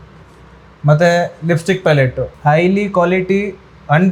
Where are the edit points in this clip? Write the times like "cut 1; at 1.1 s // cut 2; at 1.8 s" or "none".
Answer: cut 1; at 2.3 s

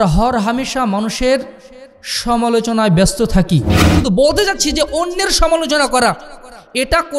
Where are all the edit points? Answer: cut 1; at 3.8 s

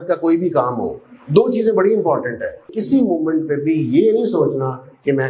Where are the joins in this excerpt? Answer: cut 1; at 2.7 s

